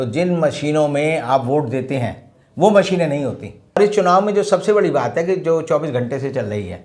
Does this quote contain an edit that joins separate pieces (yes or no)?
yes